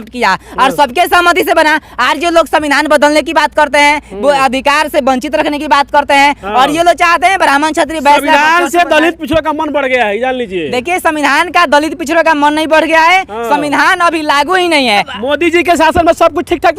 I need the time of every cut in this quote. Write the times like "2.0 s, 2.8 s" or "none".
15.1 s